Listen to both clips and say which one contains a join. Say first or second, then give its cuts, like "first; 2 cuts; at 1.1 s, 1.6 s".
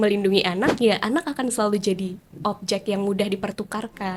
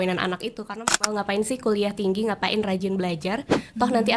second; 1 cut; at 1.0 s